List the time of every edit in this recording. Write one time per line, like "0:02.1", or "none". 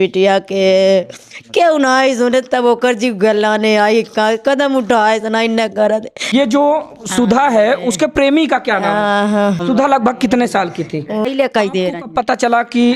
0:06.3
0:09.6
0:11.2